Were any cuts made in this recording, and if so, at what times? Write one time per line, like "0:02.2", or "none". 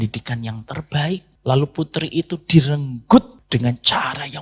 0:01.3
0:03.4